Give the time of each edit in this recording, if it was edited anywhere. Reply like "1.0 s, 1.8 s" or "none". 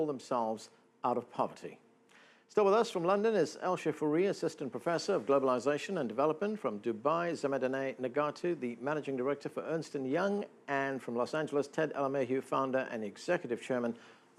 none